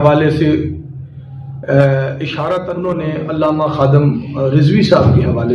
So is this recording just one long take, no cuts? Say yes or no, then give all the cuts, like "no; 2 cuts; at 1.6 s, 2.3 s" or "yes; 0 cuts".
no; 1 cut; at 2.8 s